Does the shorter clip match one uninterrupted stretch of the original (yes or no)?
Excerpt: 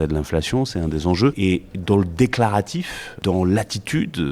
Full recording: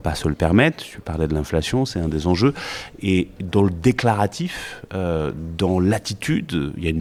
no